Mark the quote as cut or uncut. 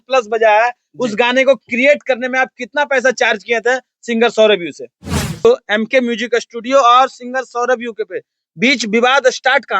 cut